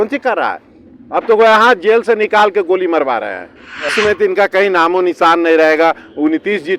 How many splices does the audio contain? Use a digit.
1